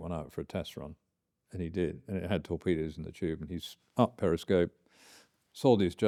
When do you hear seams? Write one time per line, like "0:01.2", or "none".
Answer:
none